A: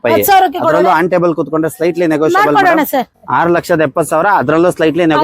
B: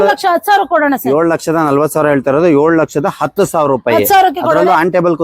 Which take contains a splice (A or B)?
A